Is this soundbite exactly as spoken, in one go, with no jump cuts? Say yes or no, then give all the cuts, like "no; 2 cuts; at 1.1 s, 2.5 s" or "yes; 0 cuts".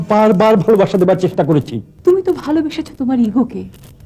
no; 1 cut; at 1.8 s